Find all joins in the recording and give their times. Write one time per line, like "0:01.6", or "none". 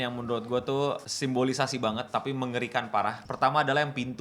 0:01.0
0:03.2